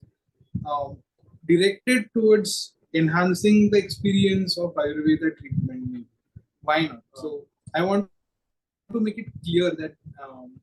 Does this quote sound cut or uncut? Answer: cut